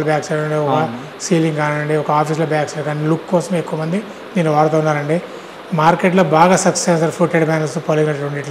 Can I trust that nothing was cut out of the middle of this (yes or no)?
yes